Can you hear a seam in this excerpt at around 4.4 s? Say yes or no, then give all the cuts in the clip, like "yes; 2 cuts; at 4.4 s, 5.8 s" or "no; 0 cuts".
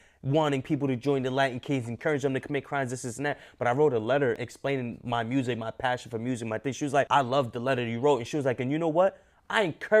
yes; 2 cuts; at 4.4 s, 7.1 s